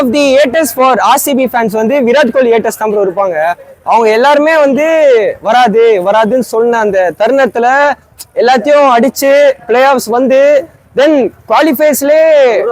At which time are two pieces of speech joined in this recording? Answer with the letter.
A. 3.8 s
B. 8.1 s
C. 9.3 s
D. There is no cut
D